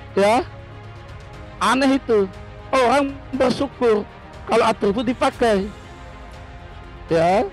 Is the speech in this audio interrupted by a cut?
no; 0 cuts

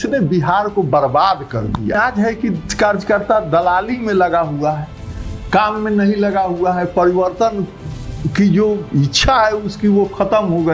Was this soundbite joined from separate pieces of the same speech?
yes; 1 cut; at 1.9 s

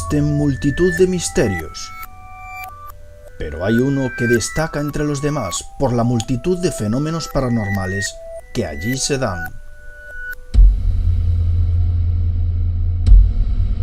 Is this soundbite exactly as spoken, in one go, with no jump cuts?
yes; 0 cuts

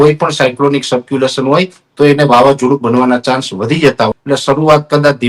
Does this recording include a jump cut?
yes; 1 cut; at 4.1 s

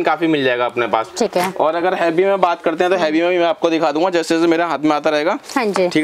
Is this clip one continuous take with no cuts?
yes; 0 cuts

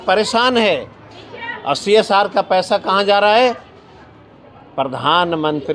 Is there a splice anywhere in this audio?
no; 0 cuts

